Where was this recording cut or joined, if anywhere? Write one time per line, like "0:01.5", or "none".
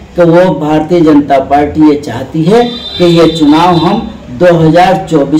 none